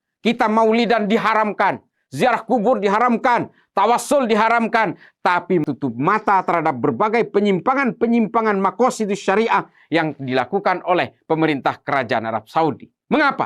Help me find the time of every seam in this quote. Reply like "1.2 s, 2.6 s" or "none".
5.6 s